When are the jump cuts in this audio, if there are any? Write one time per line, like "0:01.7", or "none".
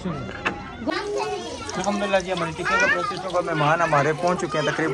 none